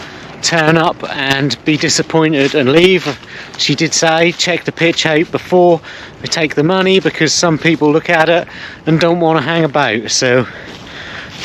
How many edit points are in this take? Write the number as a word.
zero